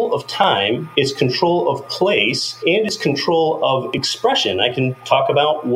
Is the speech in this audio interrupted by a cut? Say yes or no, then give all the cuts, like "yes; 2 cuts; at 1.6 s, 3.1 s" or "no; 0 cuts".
yes; 2 cuts; at 0.8 s, 2.4 s